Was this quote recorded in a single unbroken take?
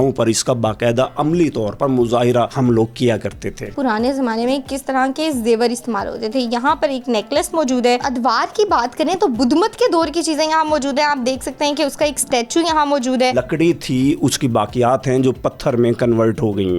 no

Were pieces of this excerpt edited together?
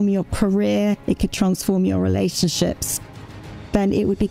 no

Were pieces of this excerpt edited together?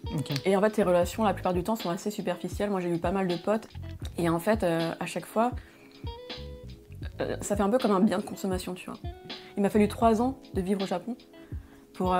yes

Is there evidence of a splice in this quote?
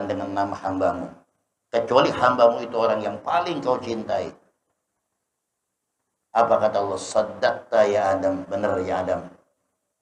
no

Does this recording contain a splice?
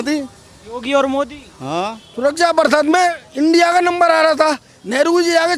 yes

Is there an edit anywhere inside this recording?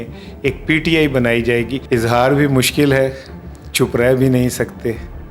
yes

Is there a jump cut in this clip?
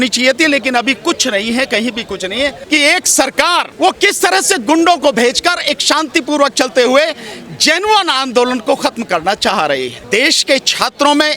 yes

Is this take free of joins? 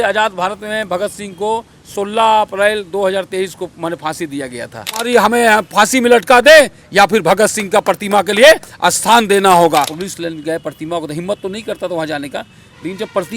no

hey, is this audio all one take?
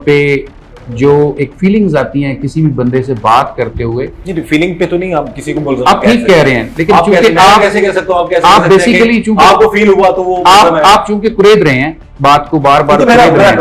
yes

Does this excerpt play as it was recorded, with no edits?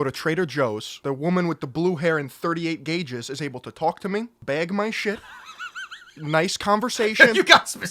no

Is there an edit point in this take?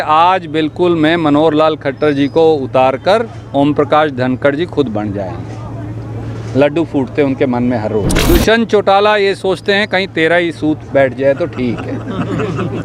yes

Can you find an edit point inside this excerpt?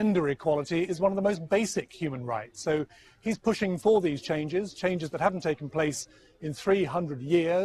yes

